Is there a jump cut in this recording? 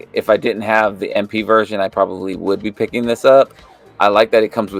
no; 0 cuts

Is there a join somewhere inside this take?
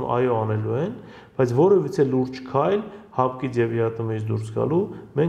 no; 0 cuts

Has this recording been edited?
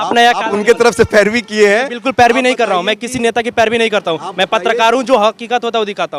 no; 0 cuts

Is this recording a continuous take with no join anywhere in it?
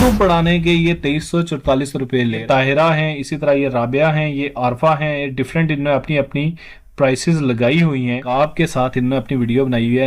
no; 2 cuts; at 2.4 s, 8.2 s

